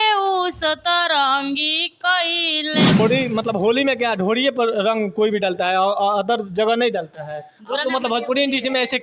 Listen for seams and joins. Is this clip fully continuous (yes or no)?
no